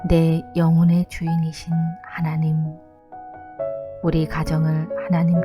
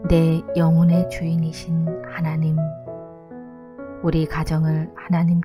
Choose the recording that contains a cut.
first; 2 cuts; at 2.8 s, 4.0 s

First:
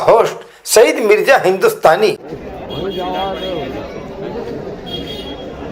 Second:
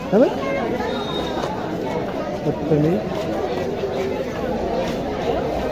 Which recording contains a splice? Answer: first; 1 cut; at 2.3 s

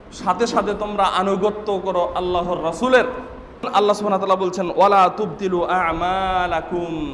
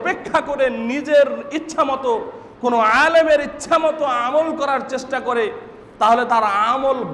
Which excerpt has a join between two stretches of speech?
first; 1 cut; at 3.7 s

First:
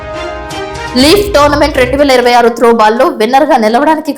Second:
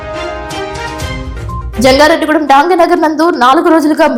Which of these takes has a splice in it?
first; 1 cut; at 0.9 s

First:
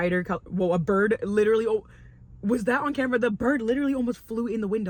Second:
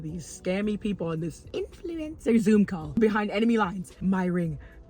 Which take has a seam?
second; 3 cuts; at 1.4 s, 3.0 s, 3.9 s

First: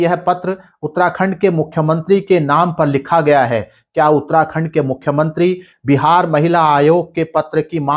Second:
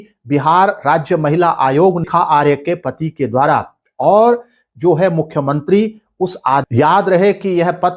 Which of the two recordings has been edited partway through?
second; 2 cuts; at 2.0 s, 6.7 s

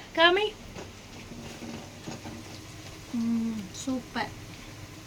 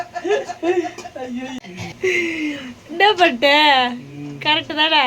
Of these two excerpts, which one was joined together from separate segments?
second; 1 cut; at 1.6 s

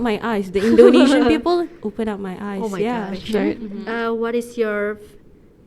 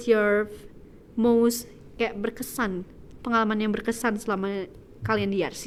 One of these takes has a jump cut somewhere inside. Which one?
first; 1 cut; at 3.5 s

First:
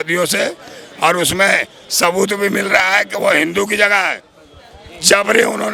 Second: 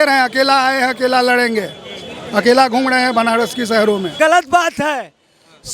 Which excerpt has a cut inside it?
second; 1 cut; at 4.1 s

